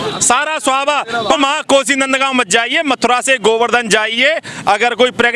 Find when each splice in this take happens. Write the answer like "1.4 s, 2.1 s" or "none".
1.2 s

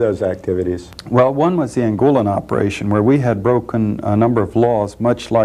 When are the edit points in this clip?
none

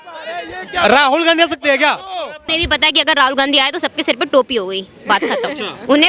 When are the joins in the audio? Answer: 2.4 s

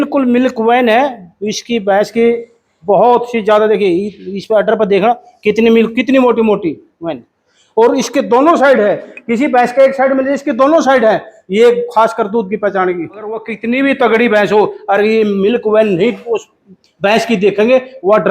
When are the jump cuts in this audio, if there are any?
13.5 s

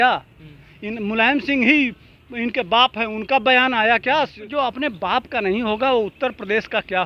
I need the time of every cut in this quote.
4.4 s

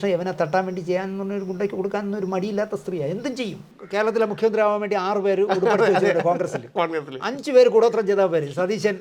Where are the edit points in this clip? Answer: 3.7 s

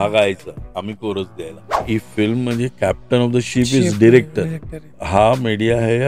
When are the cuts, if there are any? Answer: 1.8 s, 4.9 s

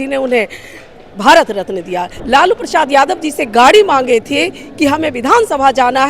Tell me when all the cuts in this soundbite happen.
2.1 s

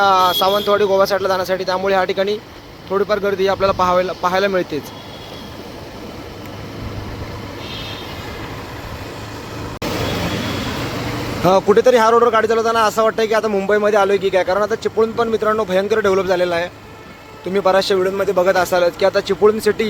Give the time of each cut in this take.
none

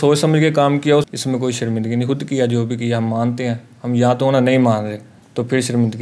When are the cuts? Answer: 1.1 s

